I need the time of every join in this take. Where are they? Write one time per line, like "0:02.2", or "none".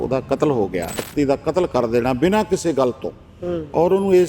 0:01.0